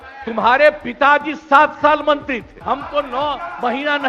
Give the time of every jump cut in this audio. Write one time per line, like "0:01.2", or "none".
0:02.5